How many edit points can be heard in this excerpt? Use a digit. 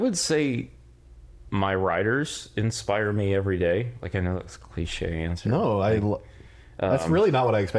0